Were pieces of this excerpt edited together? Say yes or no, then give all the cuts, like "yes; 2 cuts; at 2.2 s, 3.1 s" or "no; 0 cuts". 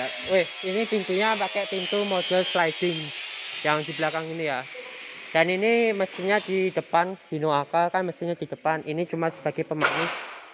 no; 0 cuts